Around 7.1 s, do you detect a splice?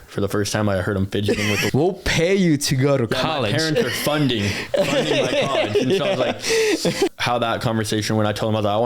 yes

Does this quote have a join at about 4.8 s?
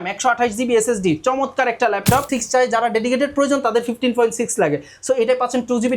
no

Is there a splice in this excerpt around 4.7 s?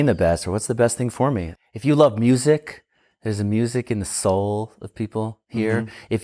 no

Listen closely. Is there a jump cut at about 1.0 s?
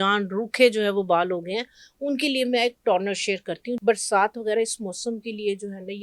no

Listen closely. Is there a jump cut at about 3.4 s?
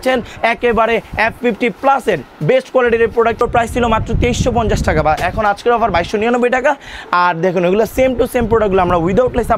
yes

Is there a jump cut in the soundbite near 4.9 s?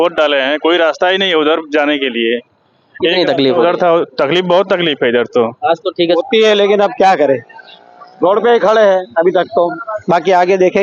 no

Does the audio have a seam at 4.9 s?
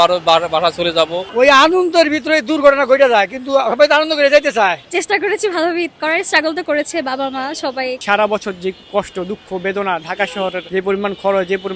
yes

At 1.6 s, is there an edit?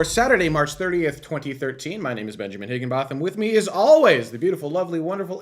no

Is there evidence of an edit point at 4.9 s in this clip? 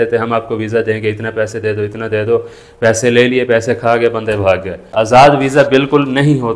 yes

